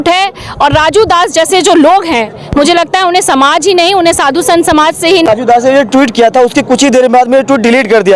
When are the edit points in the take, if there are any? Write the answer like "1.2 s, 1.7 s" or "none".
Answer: 5.3 s